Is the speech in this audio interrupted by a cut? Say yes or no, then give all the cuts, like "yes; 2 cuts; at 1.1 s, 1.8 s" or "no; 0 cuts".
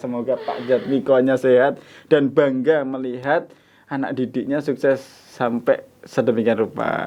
no; 0 cuts